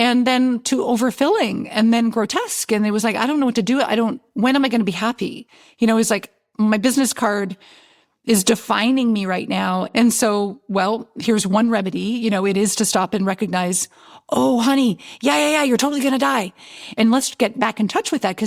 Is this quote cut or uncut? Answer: cut